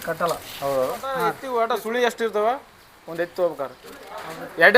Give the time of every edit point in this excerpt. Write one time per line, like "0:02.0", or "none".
0:01.4